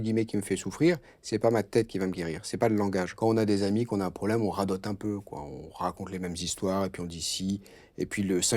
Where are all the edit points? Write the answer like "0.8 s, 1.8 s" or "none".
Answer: 3.1 s